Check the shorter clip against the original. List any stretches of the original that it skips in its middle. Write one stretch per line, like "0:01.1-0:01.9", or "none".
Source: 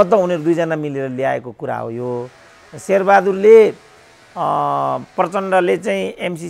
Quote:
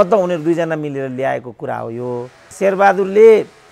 0:02.4-0:02.7